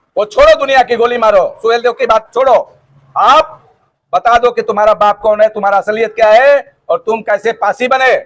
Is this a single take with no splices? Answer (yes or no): yes